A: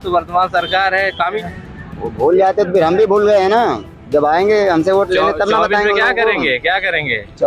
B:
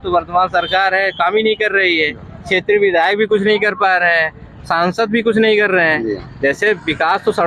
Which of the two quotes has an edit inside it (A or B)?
A